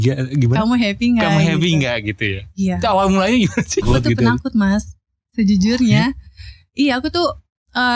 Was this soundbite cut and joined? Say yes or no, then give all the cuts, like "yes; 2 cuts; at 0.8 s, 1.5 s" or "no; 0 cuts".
yes; 1 cut; at 3.8 s